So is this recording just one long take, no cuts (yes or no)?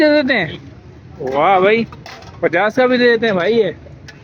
yes